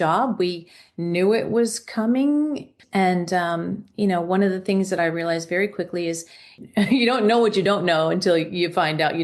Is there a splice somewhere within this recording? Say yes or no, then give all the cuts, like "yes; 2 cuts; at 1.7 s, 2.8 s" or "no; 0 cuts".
yes; 2 cuts; at 2.8 s, 6.6 s